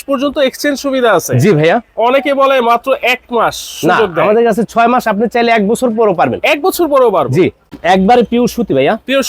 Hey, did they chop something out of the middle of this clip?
yes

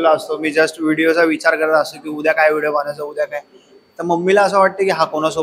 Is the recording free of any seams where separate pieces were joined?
yes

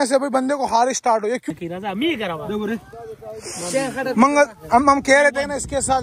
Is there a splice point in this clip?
yes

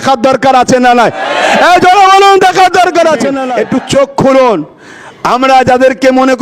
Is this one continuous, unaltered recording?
no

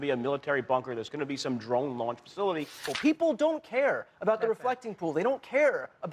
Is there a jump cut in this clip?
yes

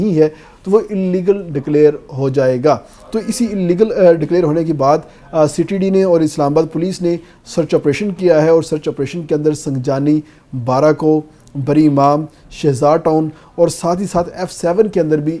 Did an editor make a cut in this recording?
no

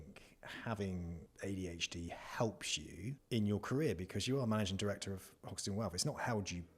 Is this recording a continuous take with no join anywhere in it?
no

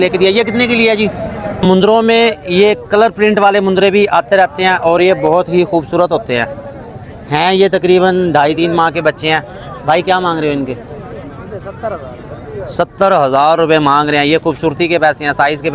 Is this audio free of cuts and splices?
no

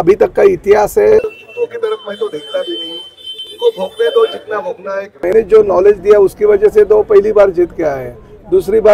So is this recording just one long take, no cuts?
no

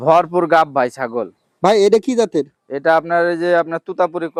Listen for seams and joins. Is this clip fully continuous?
yes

